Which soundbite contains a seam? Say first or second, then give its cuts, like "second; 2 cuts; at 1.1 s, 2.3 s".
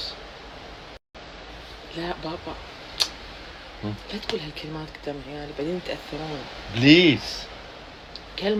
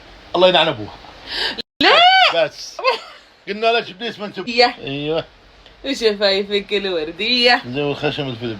second; 1 cut; at 4.5 s